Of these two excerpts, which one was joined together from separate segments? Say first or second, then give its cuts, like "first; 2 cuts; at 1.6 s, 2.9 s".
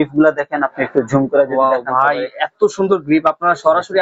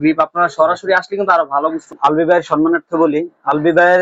second; 1 cut; at 1.9 s